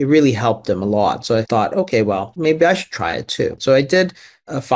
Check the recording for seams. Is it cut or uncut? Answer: cut